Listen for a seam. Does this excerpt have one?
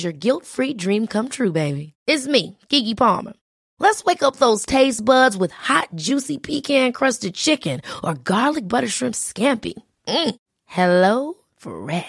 no; 0 cuts

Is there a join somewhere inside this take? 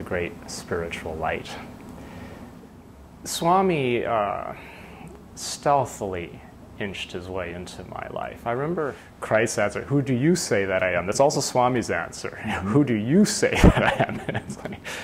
yes; 2 cuts; at 2.6 s, 9.1 s

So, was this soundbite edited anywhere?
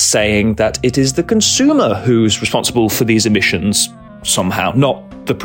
no; 0 cuts

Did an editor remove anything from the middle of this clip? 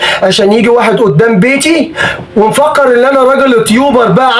no; 0 cuts

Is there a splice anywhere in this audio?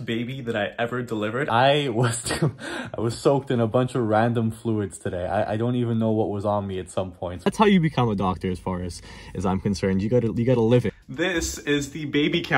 yes; 3 cuts; at 1.5 s, 7.5 s, 11.0 s

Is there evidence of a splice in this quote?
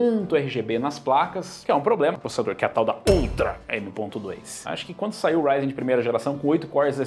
yes; 2 cuts; at 2.2 s, 4.5 s

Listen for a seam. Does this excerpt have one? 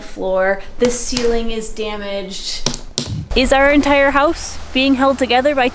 yes; 1 cut; at 3.0 s

